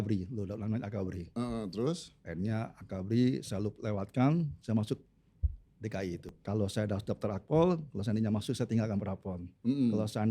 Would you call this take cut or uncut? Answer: cut